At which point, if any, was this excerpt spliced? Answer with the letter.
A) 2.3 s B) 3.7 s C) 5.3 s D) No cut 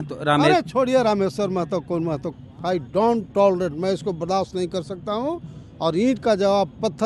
A